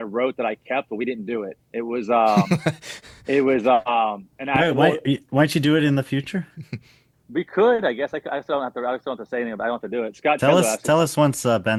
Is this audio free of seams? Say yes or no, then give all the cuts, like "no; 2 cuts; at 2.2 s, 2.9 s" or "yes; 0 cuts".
yes; 0 cuts